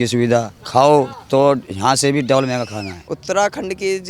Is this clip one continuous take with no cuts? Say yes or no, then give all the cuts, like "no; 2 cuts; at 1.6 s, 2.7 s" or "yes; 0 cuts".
no; 1 cut; at 3.0 s